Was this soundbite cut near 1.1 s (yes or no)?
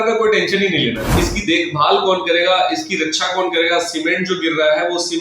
yes